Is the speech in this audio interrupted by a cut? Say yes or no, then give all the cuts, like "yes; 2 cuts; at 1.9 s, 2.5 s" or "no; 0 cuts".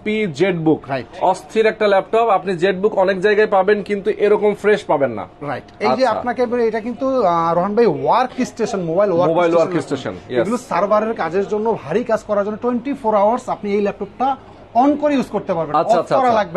no; 0 cuts